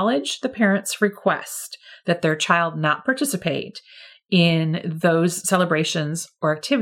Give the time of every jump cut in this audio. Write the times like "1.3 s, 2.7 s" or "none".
none